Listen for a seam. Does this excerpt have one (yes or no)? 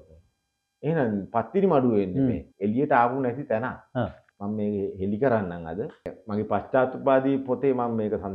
yes